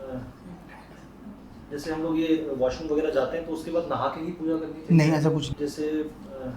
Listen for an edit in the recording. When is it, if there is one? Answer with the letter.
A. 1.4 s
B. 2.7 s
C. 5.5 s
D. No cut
C